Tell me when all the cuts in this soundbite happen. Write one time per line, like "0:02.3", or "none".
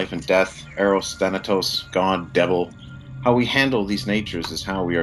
0:02.5